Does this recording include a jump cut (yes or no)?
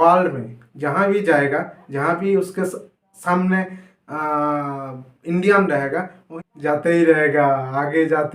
yes